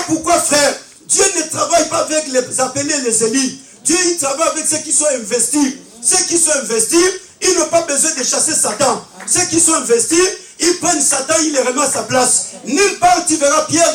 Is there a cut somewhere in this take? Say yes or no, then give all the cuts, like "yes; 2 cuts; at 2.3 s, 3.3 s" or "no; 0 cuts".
no; 0 cuts